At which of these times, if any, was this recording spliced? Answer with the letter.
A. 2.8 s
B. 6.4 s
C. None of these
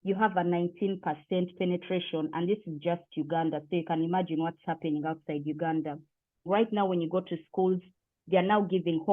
B